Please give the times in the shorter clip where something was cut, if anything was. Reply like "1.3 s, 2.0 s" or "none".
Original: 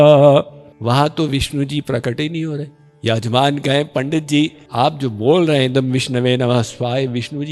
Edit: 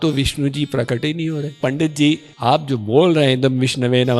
1.6 s